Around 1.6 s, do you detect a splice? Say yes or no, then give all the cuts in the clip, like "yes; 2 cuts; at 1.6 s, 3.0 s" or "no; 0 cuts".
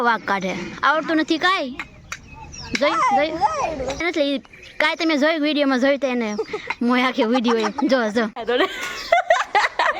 no; 2 cuts; at 4.0 s, 8.4 s